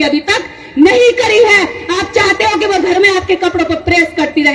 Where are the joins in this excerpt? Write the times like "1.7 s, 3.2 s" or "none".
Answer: none